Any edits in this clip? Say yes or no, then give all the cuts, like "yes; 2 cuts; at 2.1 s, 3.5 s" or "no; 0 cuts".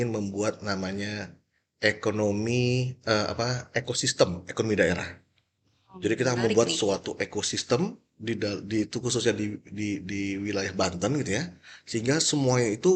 no; 0 cuts